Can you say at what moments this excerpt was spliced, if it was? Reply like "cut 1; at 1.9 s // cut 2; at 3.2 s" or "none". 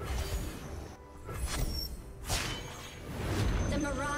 cut 1; at 1.0 s